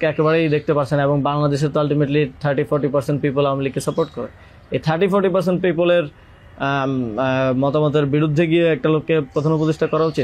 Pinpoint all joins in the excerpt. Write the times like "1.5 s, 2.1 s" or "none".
none